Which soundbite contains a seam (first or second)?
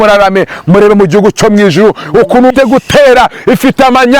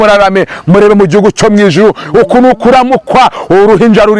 first